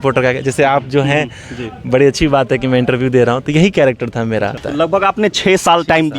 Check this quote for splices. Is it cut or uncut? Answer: cut